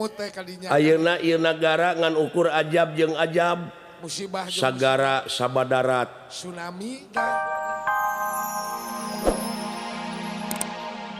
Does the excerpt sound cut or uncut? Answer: cut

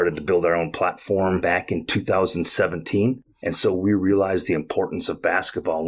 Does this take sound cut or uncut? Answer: cut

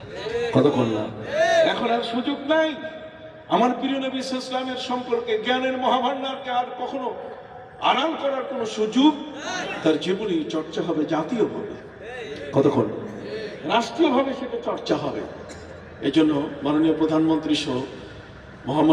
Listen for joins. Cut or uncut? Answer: uncut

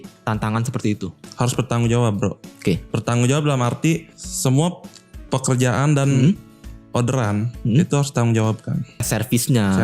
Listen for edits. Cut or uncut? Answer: cut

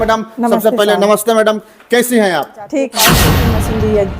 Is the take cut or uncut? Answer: cut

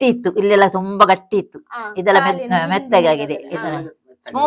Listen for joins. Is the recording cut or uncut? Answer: uncut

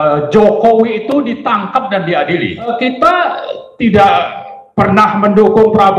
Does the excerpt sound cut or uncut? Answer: cut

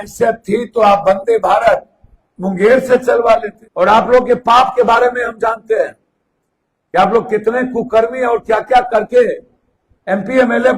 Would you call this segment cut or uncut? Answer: cut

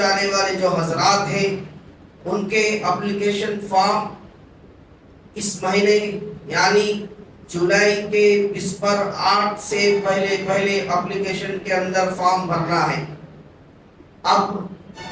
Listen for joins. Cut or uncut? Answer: uncut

